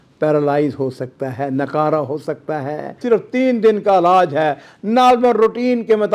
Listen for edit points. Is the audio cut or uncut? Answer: cut